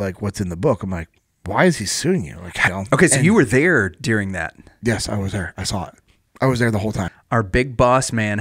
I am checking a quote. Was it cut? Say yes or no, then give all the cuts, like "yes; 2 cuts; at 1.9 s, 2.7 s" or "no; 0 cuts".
yes; 2 cuts; at 2.7 s, 7.1 s